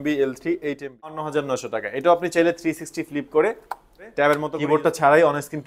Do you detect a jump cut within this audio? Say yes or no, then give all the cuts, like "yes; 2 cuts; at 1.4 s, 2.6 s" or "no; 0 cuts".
yes; 2 cuts; at 1.3 s, 4.5 s